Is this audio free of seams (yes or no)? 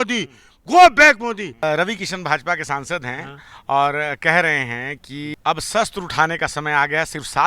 no